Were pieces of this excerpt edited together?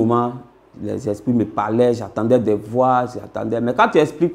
no; 0 cuts

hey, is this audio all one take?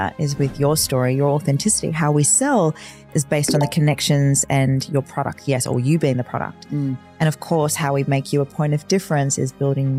yes; 0 cuts

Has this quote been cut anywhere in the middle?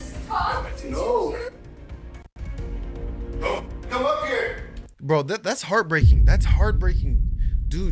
no; 0 cuts

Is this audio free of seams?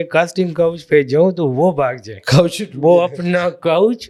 yes; 0 cuts

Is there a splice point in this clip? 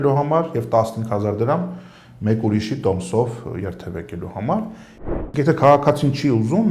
yes; 1 cut; at 4.9 s

